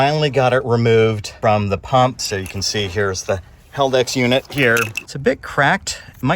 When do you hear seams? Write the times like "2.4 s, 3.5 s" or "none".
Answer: 1.3 s, 2.2 s, 5.0 s